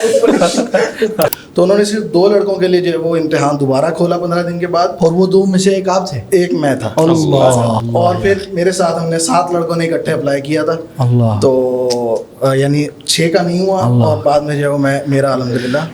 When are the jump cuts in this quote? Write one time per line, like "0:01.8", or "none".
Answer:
0:01.3
0:07.8